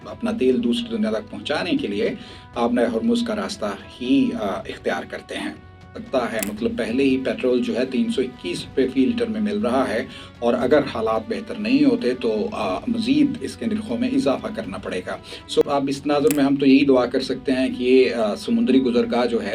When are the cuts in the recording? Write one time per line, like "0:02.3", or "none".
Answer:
0:05.9
0:15.6